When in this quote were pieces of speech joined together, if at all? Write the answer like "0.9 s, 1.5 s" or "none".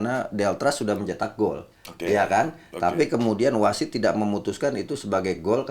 none